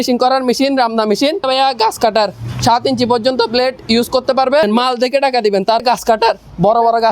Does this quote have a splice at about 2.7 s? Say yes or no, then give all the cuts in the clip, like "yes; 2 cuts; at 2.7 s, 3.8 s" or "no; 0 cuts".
no; 3 cuts; at 1.5 s, 4.6 s, 5.8 s